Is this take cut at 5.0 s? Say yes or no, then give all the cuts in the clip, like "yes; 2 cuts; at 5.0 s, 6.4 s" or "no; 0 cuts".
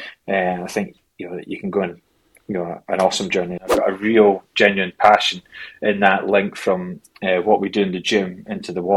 no; 1 cut; at 3.7 s